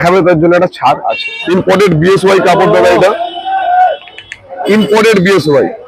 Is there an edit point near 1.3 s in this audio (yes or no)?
yes